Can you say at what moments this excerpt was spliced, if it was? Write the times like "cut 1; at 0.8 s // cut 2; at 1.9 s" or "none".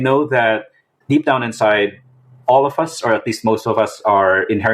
cut 1; at 0.9 s